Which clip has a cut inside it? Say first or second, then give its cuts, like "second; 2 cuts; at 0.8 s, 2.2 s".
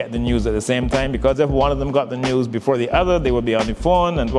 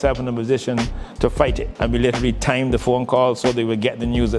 second; 1 cut; at 1.7 s